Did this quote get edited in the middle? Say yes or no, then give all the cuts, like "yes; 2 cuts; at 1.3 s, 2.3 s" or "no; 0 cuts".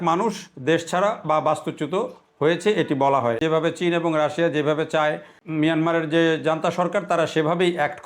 yes; 2 cuts; at 3.4 s, 5.3 s